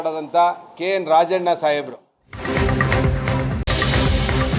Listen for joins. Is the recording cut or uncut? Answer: cut